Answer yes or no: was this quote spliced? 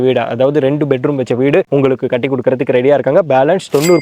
no